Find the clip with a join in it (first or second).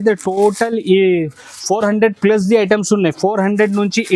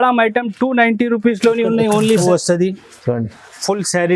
second